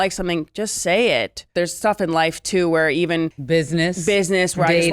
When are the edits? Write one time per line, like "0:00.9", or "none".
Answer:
0:01.5
0:03.4